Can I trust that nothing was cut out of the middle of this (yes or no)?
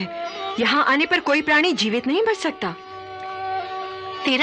yes